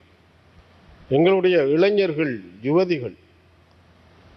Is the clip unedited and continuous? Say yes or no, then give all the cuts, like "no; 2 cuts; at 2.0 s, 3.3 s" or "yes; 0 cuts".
yes; 0 cuts